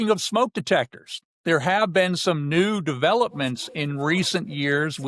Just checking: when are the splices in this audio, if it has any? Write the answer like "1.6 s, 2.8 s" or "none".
none